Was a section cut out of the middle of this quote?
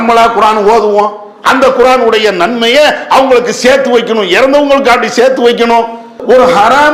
no; 0 cuts

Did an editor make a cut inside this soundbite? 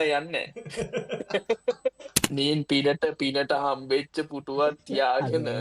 yes; 1 cut; at 2.2 s

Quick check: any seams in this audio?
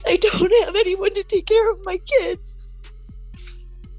no; 0 cuts

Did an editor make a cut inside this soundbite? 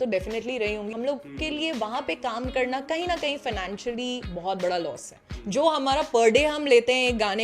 yes; 2 cuts; at 0.9 s, 5.3 s

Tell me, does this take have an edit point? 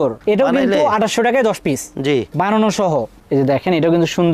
yes; 1 cut; at 3.2 s

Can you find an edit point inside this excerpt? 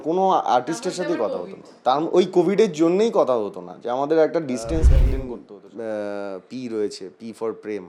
yes; 1 cut; at 5.1 s

